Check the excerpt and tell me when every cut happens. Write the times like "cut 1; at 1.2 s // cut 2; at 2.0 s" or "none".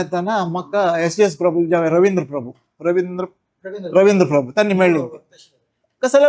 none